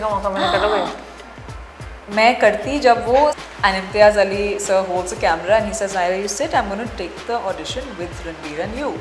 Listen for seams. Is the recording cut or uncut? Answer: cut